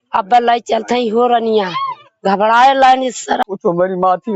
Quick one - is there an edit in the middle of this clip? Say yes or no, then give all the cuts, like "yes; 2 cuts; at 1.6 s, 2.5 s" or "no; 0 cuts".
yes; 1 cut; at 3.4 s